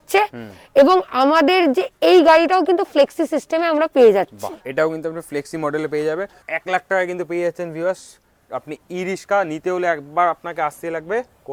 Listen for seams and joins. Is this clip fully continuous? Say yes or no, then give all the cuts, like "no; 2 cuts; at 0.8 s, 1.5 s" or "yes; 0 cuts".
yes; 0 cuts